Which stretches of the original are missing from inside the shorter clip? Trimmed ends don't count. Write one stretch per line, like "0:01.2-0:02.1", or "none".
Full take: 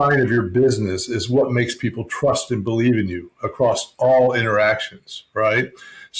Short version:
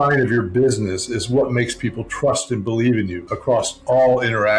0:03.2-0:03.4